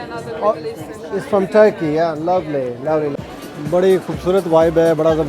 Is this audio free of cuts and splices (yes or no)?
no